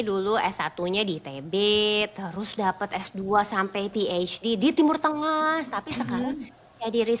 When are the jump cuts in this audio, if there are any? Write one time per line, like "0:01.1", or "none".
none